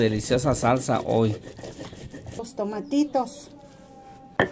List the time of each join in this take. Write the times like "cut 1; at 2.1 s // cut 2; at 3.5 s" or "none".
none

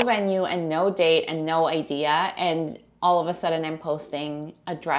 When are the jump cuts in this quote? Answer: none

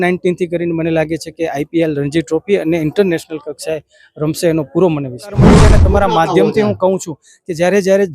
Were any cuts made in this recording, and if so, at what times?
cut 1; at 5.5 s

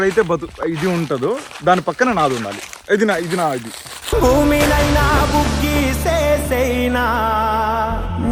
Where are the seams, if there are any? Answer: none

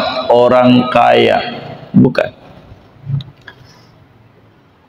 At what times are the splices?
none

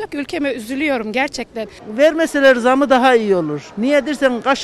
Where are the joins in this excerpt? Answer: cut 1; at 1.8 s

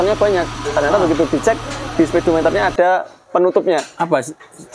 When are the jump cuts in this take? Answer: none

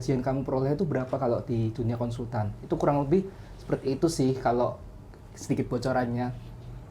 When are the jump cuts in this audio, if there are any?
none

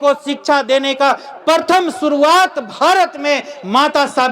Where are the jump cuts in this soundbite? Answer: none

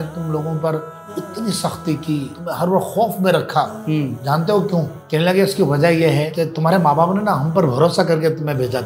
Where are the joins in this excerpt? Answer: cut 1; at 2.3 s // cut 2; at 4.2 s // cut 3; at 5.0 s // cut 4; at 6.3 s

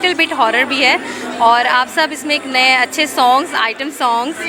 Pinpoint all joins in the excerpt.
none

